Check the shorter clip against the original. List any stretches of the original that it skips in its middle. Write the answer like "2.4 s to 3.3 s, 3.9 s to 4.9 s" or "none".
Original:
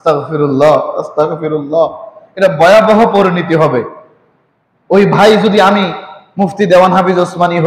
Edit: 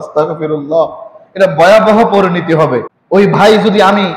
3.9 s to 4.7 s